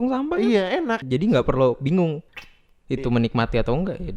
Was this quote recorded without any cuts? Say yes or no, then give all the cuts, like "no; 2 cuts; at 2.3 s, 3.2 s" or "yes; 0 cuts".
no; 2 cuts; at 1.0 s, 2.3 s